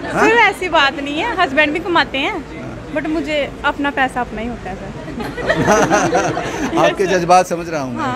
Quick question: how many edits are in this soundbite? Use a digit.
0